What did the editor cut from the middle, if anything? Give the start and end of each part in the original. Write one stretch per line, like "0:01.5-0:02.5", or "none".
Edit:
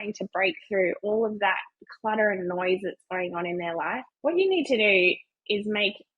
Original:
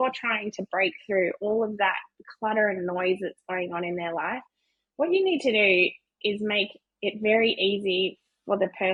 0:04.5-0:04.8